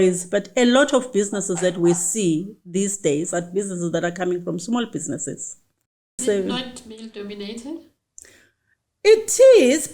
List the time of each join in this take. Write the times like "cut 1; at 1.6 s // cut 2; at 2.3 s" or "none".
cut 1; at 6.2 s